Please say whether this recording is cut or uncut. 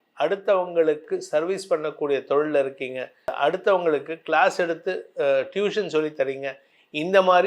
cut